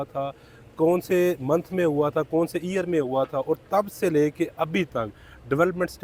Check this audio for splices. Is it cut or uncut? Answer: uncut